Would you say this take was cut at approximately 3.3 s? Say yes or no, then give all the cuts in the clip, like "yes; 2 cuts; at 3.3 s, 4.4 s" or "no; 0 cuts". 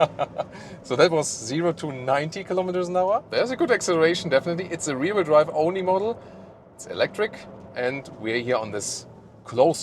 yes; 1 cut; at 3.3 s